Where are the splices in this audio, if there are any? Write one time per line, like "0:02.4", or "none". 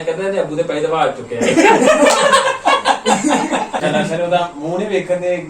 0:03.8